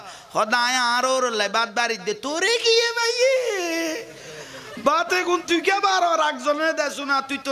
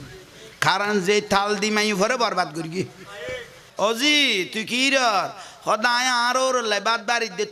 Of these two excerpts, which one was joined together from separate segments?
second; 1 cut; at 3.7 s

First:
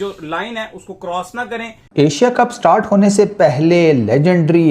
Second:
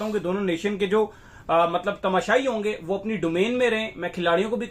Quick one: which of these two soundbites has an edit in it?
first; 1 cut; at 1.8 s

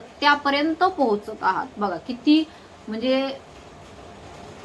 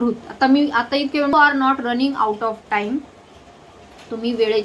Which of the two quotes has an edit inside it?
second; 1 cut; at 1.3 s

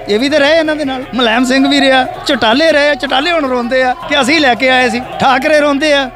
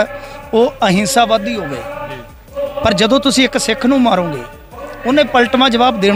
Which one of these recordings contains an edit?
first; 4 cuts; at 1.0 s, 2.2 s, 4.0 s, 5.1 s

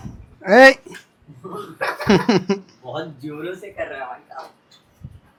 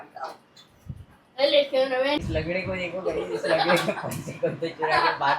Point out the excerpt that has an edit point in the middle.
second; 1 cut; at 2.2 s

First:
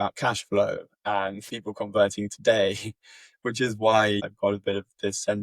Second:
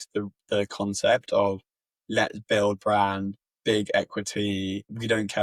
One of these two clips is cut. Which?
first; 2 cuts; at 1.6 s, 4.3 s

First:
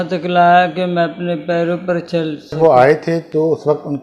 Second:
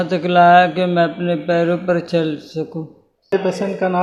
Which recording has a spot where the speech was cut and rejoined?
first; 1 cut; at 2.6 s

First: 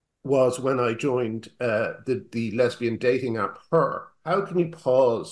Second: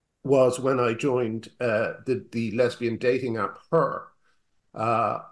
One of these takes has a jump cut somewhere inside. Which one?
first; 1 cut; at 4.1 s

